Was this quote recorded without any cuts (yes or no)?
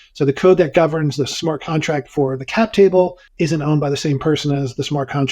no